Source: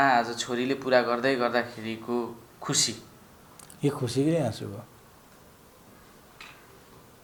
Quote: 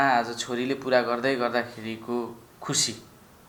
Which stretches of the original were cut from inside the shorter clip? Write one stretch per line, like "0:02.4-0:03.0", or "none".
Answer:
none